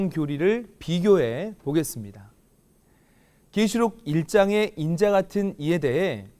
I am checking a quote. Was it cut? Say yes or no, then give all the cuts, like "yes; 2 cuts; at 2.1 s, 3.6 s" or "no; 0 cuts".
yes; 1 cut; at 4.0 s